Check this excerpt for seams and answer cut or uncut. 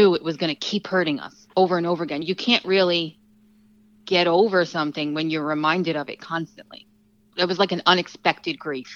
cut